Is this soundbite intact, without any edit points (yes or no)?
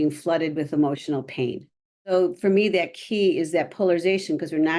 no